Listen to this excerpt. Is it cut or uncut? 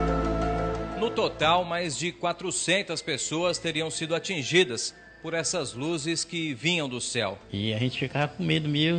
cut